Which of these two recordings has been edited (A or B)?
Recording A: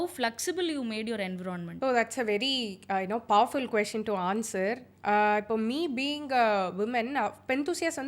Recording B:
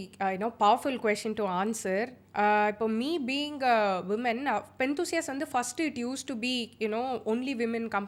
A